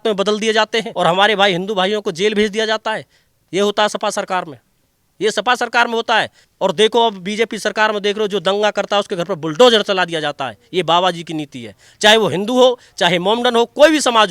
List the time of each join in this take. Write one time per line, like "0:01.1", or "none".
0:00.9
0:06.4